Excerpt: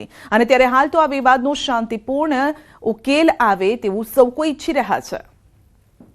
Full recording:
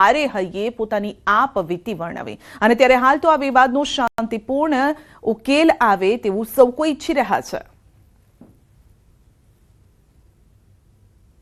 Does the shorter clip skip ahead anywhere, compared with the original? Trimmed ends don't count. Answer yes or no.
yes